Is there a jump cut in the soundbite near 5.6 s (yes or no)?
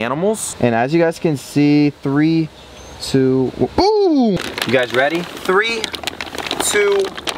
no